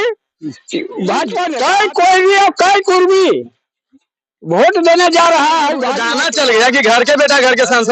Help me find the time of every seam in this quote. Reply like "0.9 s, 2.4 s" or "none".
1.5 s, 6.0 s